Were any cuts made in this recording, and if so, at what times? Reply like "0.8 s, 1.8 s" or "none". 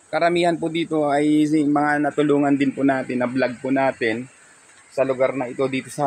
none